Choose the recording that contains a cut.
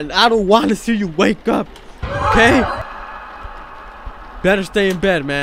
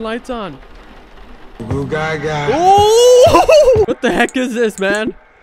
second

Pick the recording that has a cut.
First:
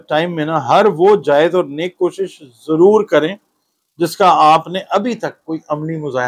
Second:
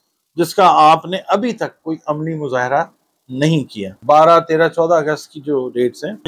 second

